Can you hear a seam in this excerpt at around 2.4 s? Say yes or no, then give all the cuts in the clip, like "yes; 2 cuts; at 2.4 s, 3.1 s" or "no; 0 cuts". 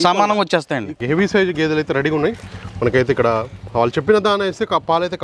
no; 1 cut; at 1.0 s